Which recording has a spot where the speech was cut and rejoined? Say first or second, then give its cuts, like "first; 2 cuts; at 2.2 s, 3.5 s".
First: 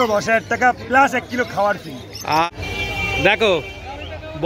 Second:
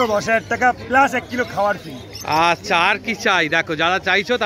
first; 1 cut; at 2.4 s